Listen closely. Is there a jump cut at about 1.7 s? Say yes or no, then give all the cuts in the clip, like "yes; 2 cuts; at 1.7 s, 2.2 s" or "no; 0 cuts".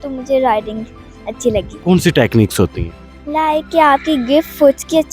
yes; 1 cut; at 1.7 s